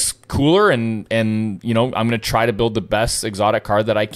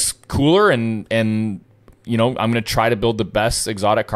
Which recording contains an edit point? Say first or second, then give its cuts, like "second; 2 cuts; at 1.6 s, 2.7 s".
first; 1 cut; at 1.6 s